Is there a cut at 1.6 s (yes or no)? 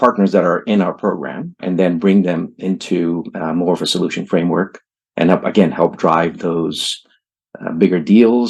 yes